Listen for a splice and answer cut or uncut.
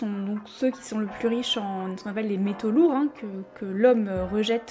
uncut